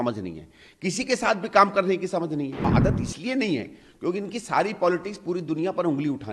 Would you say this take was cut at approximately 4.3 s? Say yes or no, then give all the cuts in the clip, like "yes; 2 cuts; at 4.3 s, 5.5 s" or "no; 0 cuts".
no; 1 cut; at 2.7 s